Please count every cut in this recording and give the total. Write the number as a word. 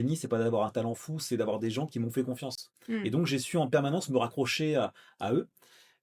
zero